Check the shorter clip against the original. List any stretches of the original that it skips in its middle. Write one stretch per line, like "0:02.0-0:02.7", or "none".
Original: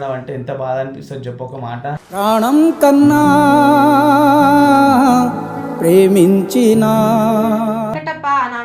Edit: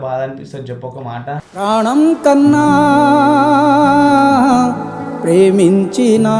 none